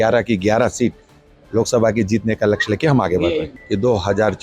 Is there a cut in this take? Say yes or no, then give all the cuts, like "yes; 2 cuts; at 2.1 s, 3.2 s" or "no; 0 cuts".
yes; 1 cut; at 3.5 s